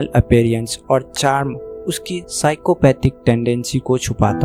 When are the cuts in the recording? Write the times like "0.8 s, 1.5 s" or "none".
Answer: none